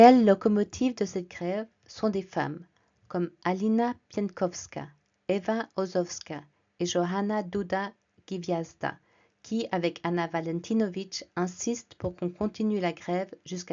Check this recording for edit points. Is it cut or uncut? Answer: uncut